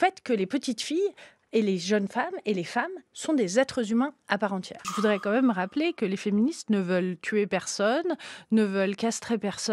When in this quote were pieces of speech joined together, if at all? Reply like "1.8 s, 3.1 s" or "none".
4.8 s